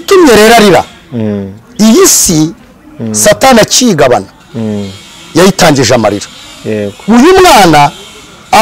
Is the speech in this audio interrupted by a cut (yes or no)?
yes